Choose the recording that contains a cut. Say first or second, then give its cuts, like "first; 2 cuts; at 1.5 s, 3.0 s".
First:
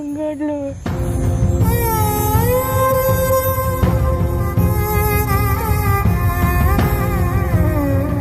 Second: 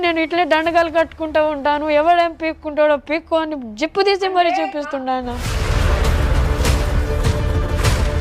second; 1 cut; at 5.5 s